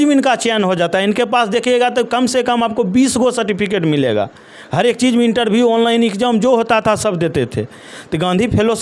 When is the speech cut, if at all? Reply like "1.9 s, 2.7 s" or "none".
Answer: none